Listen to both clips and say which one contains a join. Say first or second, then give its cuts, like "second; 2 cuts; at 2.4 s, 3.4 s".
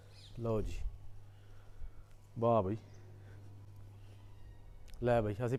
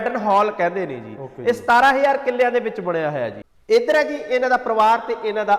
second; 1 cut; at 3.5 s